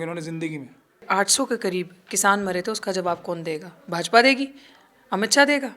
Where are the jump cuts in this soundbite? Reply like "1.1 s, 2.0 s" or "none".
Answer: 1.0 s